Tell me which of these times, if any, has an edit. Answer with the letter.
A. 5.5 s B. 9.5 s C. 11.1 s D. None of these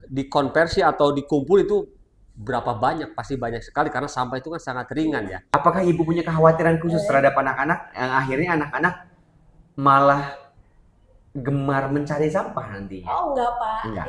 A